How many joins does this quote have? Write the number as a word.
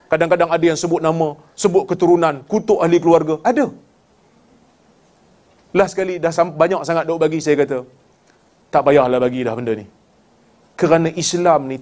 zero